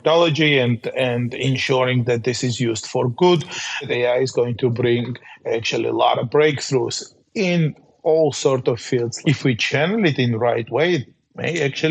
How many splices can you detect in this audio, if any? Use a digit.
2